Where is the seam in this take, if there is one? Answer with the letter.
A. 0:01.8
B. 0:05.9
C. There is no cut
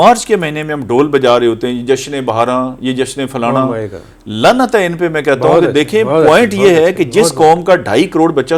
C